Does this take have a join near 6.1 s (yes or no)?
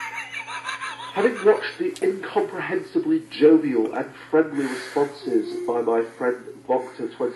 yes